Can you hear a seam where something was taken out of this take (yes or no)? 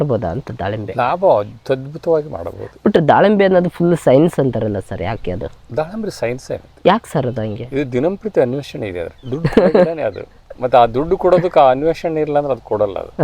no